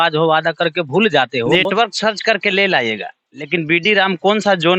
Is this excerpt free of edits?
no; 1 cut; at 1.5 s

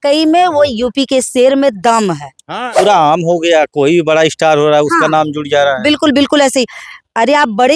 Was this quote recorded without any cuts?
no; 1 cut; at 2.7 s

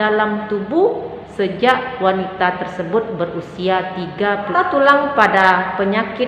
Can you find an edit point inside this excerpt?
yes; 1 cut; at 4.5 s

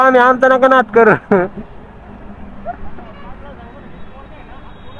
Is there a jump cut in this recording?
no; 0 cuts

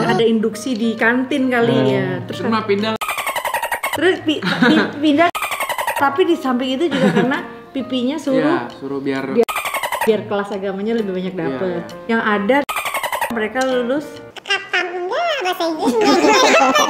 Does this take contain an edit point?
no; 0 cuts

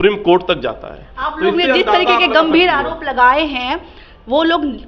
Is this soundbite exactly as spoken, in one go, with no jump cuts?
yes; 0 cuts

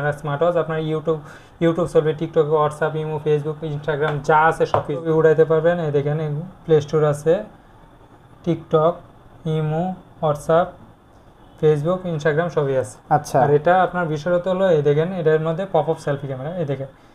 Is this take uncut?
no; 1 cut; at 5.1 s

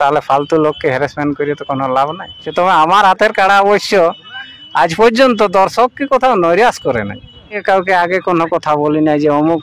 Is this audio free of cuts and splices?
no; 2 cuts; at 2.4 s, 7.6 s

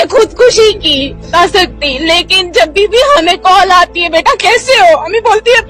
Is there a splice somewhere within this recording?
yes; 1 cut; at 1.3 s

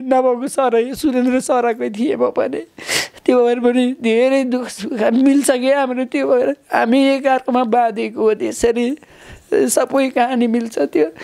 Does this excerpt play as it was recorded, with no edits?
yes; 0 cuts

